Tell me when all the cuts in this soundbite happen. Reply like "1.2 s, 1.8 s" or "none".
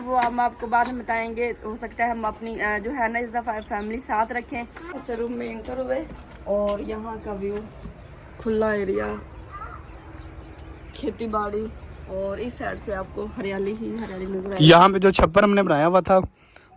4.8 s